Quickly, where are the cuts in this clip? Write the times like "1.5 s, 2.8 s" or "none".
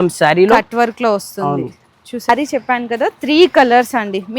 2.3 s